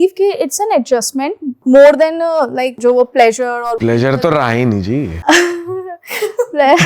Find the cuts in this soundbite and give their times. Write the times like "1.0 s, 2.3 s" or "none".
1.5 s, 2.7 s, 3.8 s, 5.1 s